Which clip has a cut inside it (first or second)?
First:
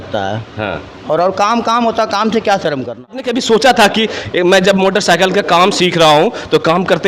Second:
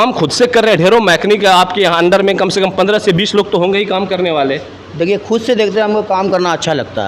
first